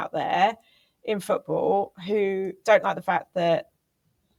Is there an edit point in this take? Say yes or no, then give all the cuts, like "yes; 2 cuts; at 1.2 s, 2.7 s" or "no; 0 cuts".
no; 0 cuts